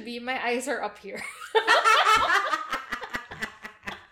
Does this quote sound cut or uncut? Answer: uncut